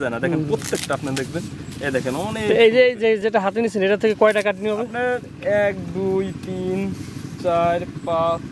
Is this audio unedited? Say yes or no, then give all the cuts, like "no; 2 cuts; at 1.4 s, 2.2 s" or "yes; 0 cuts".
yes; 0 cuts